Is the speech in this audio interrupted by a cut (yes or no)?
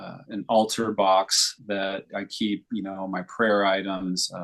no